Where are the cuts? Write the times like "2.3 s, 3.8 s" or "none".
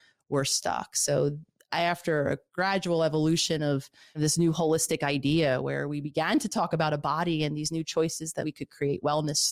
4.0 s, 8.4 s